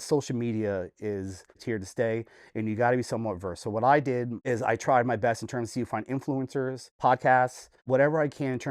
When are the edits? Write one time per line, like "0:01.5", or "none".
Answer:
0:01.6
0:04.4
0:06.8
0:07.7